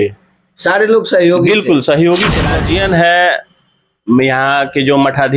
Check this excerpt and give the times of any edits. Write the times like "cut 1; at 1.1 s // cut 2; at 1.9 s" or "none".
cut 1; at 2.5 s